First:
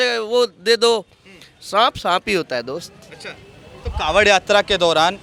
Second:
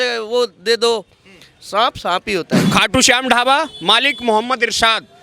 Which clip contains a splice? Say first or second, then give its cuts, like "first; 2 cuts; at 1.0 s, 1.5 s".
second; 1 cut; at 2.6 s